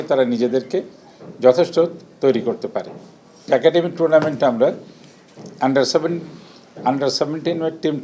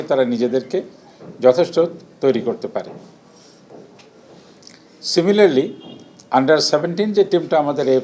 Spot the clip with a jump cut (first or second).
first